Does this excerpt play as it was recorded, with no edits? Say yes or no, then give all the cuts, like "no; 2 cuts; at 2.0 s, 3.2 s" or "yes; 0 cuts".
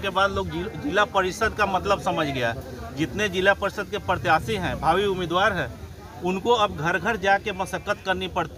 yes; 0 cuts